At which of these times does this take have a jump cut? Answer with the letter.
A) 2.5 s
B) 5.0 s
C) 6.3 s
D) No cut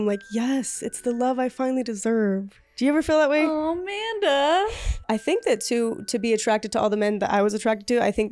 B